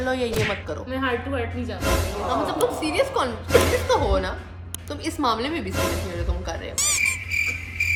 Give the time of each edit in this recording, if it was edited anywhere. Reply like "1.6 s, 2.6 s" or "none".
none

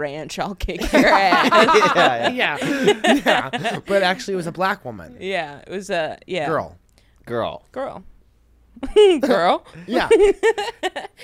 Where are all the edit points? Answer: none

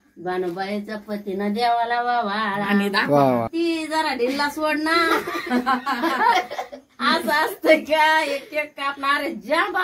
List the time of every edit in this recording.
3.5 s

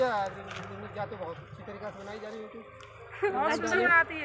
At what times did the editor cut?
none

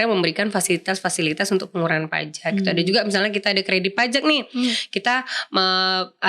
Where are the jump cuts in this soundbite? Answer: none

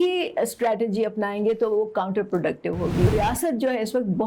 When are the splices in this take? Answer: 3.1 s

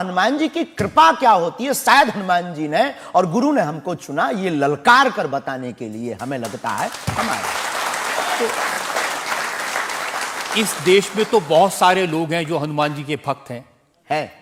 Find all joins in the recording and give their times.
none

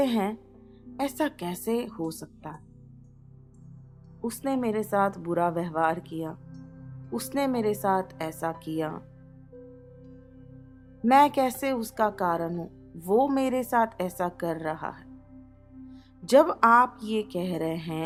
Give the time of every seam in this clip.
none

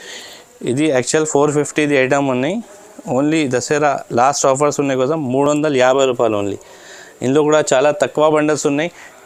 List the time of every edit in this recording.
none

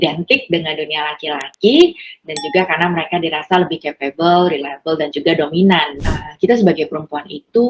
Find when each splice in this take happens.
6.0 s

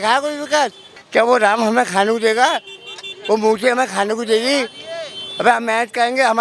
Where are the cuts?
0.9 s

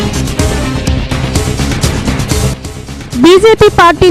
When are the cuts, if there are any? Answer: none

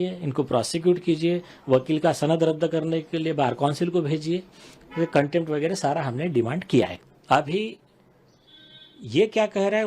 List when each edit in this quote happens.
7.1 s

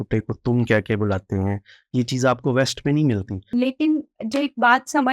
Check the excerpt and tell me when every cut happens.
3.4 s

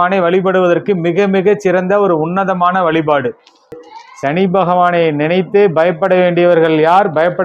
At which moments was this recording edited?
3.9 s

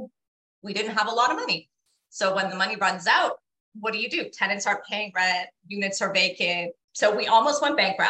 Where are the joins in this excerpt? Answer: 6.8 s

